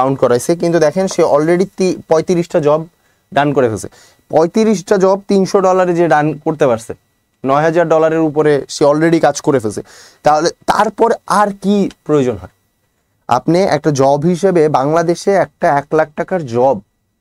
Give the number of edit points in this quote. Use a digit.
0